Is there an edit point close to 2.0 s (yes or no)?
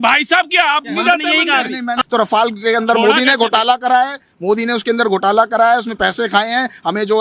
yes